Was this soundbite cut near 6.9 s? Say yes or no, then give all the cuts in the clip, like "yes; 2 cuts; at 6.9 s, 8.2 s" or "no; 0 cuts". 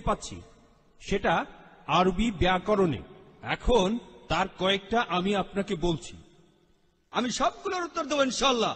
yes; 1 cut; at 6.9 s